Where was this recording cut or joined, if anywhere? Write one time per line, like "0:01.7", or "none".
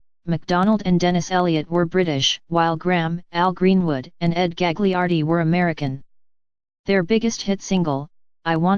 none